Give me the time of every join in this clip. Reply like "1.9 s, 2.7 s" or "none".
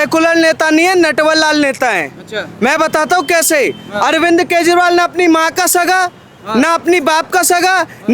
none